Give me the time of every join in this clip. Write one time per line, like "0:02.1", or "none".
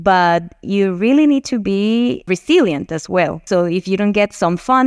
0:02.3
0:03.4